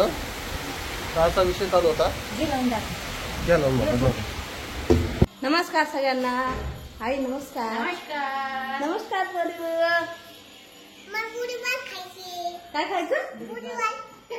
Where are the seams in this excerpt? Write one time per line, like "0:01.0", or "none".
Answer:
0:05.2